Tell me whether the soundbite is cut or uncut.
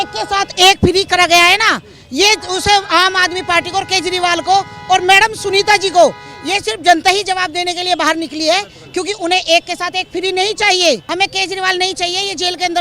cut